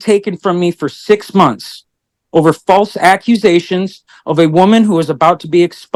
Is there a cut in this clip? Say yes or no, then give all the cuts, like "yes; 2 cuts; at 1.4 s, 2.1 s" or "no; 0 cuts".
no; 0 cuts